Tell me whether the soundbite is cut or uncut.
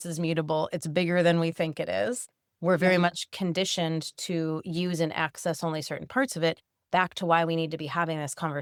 uncut